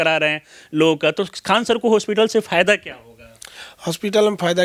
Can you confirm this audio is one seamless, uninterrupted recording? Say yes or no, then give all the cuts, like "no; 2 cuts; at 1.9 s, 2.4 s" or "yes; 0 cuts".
yes; 0 cuts